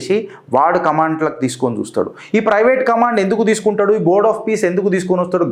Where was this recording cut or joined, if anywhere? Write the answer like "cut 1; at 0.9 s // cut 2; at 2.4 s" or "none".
none